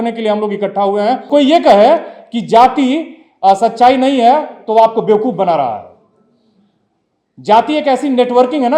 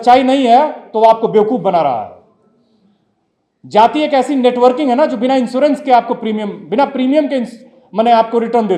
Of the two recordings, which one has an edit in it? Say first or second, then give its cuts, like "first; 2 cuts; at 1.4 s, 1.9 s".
first; 1 cut; at 1.3 s